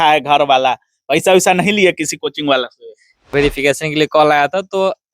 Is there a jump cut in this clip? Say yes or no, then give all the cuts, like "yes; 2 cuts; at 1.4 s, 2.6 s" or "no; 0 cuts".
yes; 1 cut; at 3.3 s